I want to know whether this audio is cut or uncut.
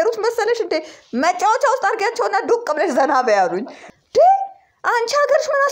cut